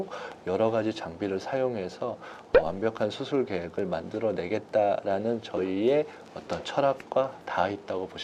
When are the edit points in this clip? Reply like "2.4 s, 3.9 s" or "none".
none